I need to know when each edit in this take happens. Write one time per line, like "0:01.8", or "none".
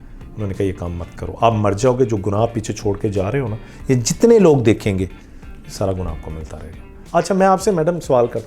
0:07.0